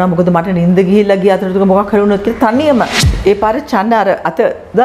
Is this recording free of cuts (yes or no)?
no